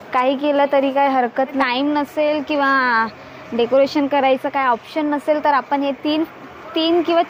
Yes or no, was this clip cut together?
yes